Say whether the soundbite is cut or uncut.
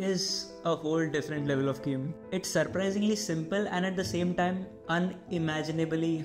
uncut